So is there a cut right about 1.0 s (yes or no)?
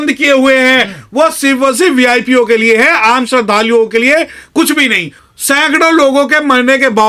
no